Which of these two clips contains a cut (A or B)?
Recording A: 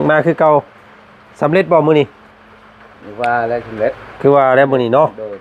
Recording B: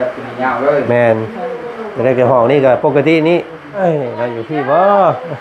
B